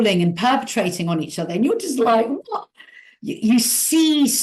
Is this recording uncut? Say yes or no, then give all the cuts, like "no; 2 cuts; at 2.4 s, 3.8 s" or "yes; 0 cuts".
yes; 0 cuts